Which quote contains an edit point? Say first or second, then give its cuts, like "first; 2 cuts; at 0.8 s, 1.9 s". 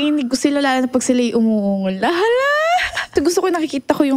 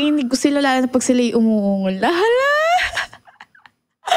first; 1 cut; at 3.1 s